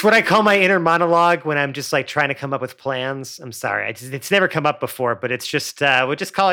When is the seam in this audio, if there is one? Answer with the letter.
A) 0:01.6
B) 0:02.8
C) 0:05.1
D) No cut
D